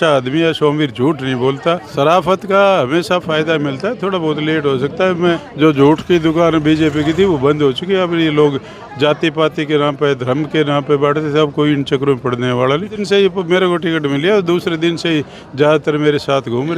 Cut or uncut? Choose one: cut